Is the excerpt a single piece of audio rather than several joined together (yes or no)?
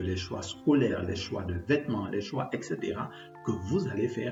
yes